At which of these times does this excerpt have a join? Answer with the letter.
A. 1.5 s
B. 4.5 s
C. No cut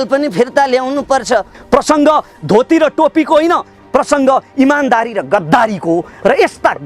A